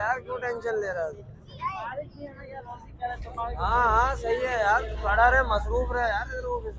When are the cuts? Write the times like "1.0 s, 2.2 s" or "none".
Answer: none